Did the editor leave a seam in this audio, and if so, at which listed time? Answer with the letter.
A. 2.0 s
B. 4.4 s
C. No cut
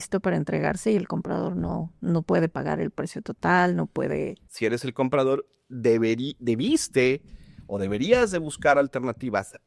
B